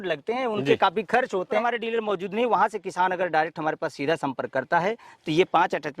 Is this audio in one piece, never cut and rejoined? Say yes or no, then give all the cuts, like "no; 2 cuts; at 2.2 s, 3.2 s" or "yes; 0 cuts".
no; 1 cut; at 1.6 s